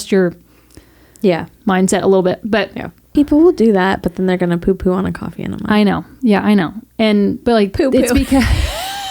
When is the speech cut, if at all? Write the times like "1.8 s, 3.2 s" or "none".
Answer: 3.1 s, 7.4 s